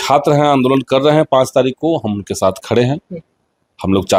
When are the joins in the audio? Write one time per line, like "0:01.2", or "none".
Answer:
none

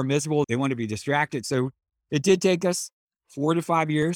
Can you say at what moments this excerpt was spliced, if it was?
0:01.4

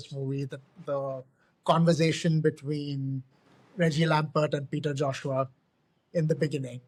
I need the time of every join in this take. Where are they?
none

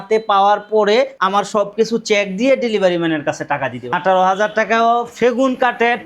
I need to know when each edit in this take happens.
0:01.2
0:03.9

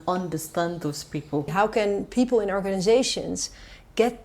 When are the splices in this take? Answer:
0:01.5

